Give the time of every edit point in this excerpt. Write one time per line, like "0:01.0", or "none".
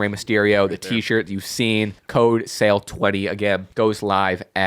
0:02.0
0:03.7